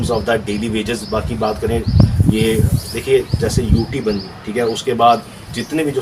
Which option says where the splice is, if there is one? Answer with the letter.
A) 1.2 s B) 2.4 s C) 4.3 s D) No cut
D